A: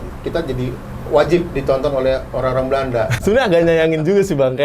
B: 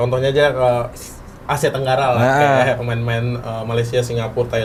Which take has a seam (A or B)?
A